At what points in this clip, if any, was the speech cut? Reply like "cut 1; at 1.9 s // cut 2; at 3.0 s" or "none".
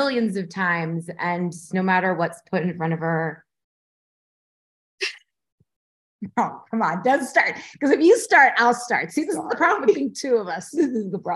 none